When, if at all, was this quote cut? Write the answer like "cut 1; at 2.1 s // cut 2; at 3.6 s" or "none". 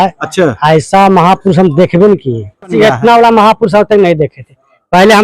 cut 1; at 2.7 s